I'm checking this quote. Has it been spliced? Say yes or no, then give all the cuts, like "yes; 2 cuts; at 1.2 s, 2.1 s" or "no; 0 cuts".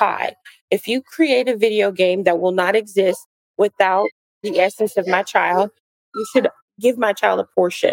yes; 1 cut; at 6.7 s